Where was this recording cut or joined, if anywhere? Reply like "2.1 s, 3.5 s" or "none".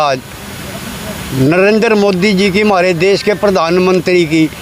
none